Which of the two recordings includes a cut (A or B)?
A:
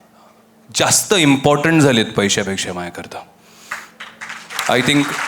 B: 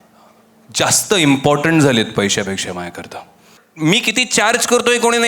B